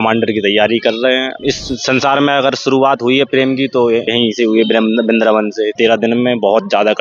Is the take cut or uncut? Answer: cut